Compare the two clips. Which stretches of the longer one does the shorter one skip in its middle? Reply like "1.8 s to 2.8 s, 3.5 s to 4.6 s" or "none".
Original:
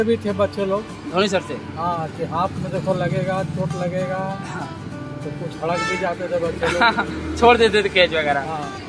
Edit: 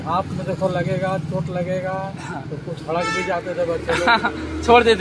4.8 s to 5.2 s